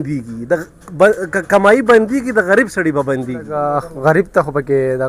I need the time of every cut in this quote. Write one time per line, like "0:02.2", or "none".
0:03.5